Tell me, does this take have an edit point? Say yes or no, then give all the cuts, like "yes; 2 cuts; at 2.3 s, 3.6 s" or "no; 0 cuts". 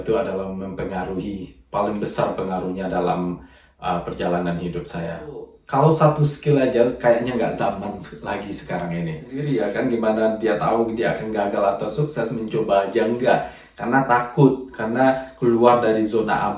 yes; 2 cuts; at 5.5 s, 9.4 s